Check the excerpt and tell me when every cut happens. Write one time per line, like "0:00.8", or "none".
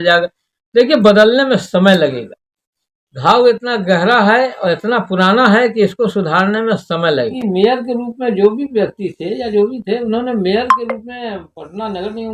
0:07.4